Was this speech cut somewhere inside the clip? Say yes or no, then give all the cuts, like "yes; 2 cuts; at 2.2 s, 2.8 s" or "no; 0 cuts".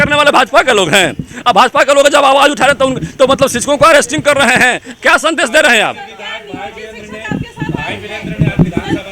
no; 0 cuts